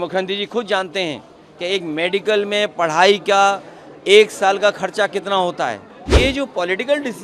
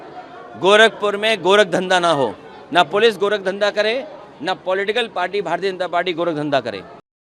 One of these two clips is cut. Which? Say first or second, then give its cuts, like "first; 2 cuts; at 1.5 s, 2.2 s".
first; 1 cut; at 6.1 s